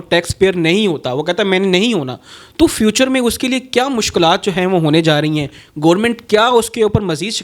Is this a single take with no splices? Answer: yes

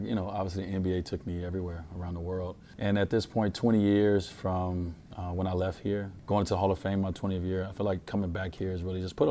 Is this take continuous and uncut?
no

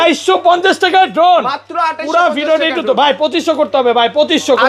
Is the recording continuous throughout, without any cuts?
yes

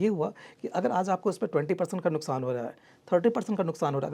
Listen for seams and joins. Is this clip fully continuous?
yes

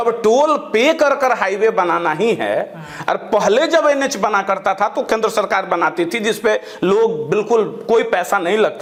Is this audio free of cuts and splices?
yes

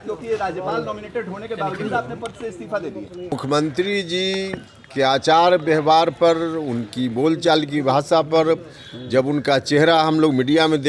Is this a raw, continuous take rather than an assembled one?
no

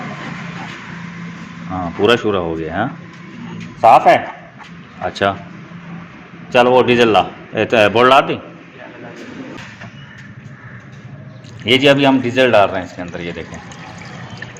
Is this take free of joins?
no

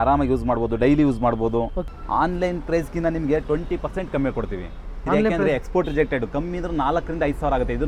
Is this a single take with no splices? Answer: yes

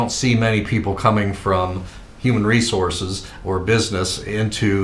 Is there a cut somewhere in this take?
no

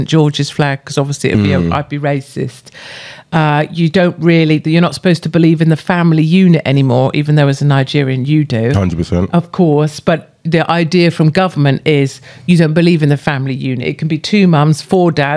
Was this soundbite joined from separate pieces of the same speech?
no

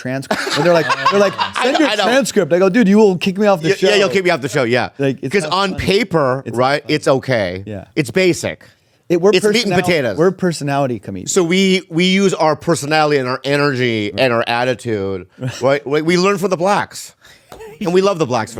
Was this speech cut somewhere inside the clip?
no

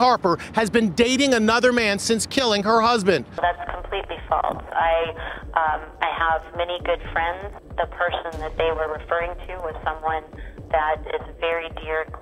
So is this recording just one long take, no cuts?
no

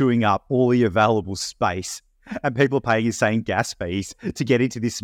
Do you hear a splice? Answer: no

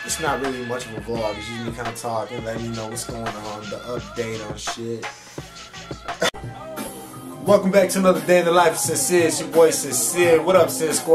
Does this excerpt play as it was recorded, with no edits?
no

